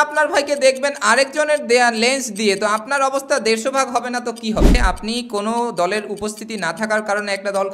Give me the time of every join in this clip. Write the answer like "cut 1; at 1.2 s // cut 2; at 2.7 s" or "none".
cut 1; at 4.8 s